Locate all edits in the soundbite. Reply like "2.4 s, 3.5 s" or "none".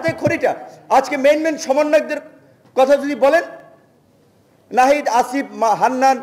none